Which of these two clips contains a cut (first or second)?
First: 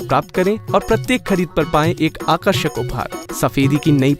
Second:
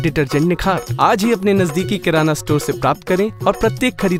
first